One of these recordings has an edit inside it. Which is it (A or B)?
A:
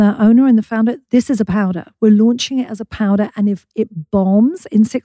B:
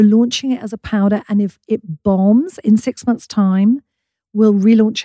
A